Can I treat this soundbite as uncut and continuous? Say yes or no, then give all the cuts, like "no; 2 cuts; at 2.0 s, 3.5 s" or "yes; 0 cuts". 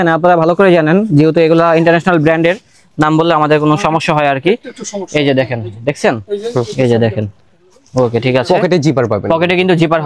yes; 0 cuts